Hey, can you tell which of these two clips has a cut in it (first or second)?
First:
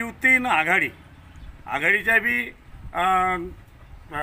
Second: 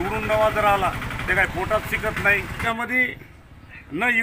second